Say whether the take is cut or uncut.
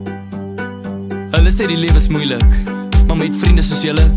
cut